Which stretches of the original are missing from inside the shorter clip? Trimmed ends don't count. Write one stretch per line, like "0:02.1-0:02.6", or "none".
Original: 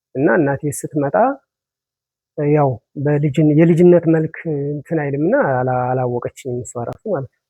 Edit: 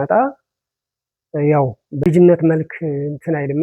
0:03.1-0:03.7